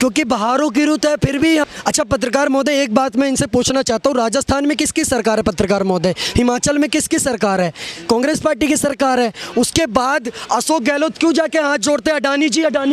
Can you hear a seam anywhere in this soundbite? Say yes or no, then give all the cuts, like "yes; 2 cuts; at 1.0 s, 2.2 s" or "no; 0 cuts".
yes; 1 cut; at 1.7 s